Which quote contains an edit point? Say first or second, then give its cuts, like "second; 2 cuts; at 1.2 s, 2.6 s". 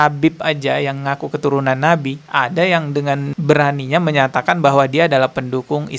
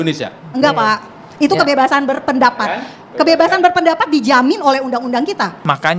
first; 1 cut; at 3.3 s